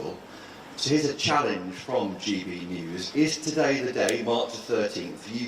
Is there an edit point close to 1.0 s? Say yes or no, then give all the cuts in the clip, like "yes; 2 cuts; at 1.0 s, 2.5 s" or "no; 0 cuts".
yes; 1 cut; at 1.0 s